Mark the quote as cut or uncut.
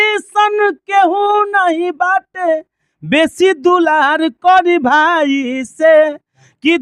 uncut